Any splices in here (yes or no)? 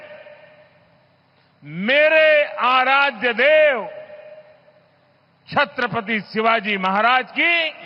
no